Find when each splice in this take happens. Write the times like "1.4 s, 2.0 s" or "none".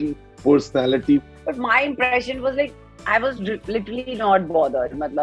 1.2 s